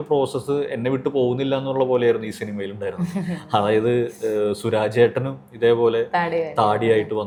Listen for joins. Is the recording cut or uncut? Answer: uncut